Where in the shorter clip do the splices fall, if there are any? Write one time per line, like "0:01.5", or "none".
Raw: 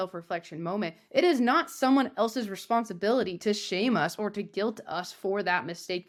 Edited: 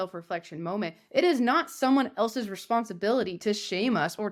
none

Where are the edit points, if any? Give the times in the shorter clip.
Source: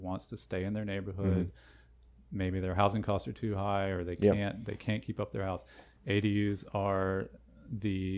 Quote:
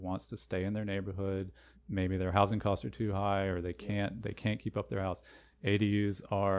0:01.2

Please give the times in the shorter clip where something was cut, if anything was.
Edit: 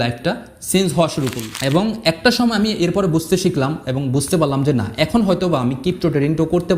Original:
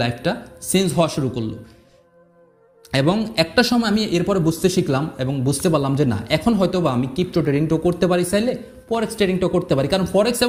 0:01.5

